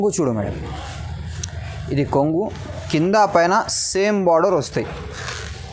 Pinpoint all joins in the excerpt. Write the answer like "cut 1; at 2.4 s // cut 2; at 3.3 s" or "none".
none